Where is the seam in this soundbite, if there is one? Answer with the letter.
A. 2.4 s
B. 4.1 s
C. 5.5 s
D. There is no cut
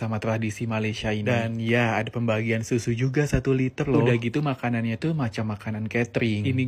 D